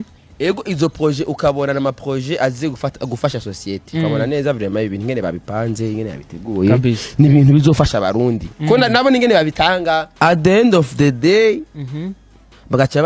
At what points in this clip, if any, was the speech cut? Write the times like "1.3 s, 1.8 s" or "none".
10.1 s